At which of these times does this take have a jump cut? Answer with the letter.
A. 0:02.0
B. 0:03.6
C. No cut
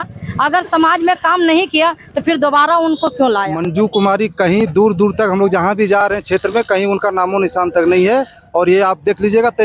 B